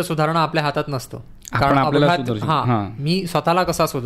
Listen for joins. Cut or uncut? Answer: uncut